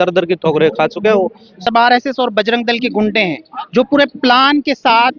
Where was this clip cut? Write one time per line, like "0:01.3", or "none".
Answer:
0:01.6